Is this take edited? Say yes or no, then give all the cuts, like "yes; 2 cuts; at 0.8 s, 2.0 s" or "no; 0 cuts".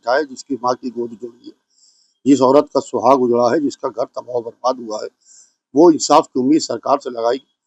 no; 0 cuts